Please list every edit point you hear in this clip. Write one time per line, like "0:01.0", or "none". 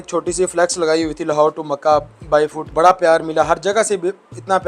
0:02.6